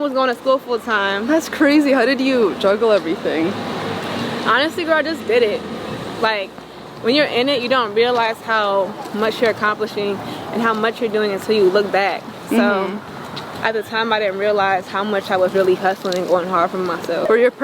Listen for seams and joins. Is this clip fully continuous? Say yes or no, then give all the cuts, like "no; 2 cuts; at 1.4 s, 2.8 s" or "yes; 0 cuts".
yes; 0 cuts